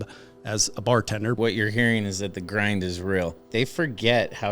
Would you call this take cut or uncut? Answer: cut